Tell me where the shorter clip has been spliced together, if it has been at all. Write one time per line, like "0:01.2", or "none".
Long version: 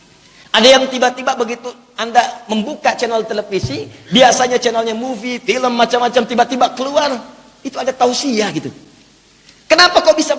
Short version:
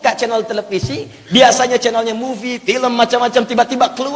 none